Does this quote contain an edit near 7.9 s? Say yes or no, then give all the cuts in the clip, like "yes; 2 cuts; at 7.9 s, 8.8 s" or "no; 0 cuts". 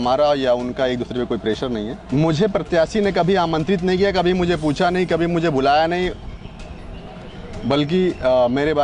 no; 1 cut; at 2.0 s